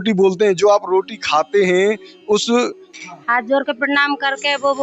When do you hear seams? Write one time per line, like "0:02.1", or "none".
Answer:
0:02.8